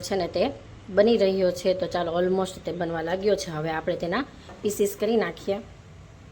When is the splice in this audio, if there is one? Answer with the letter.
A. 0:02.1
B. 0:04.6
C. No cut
C